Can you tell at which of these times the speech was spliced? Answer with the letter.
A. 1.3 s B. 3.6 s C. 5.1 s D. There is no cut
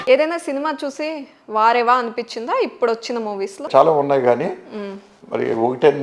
B